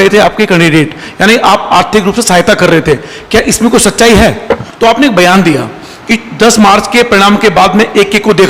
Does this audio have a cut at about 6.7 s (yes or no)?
no